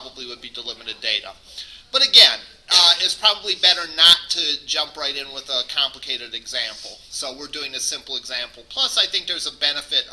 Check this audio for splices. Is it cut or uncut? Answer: uncut